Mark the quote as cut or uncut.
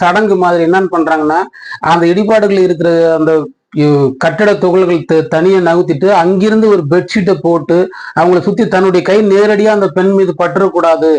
uncut